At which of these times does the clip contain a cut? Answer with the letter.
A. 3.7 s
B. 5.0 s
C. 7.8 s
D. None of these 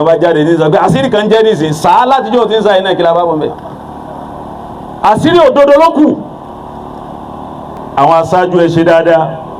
C